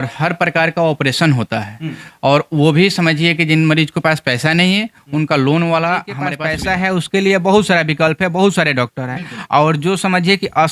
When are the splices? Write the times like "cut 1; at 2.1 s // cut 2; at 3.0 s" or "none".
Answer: cut 1; at 6.4 s